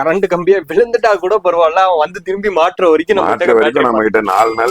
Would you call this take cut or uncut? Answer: uncut